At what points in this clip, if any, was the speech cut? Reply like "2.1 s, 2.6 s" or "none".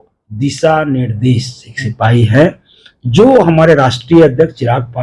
none